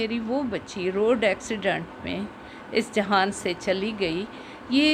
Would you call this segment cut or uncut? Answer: uncut